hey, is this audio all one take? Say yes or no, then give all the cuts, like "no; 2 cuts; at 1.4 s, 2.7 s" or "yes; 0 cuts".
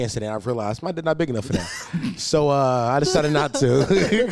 yes; 0 cuts